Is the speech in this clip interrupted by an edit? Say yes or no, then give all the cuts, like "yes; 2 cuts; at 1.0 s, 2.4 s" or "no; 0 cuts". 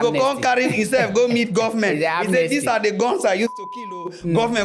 no; 0 cuts